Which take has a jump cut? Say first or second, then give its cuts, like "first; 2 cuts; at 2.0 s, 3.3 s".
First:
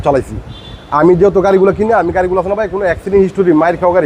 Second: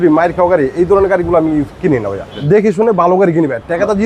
second; 1 cut; at 2.3 s